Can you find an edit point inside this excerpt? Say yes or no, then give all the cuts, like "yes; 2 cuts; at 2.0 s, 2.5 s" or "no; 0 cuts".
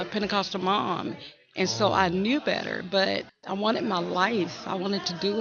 no; 0 cuts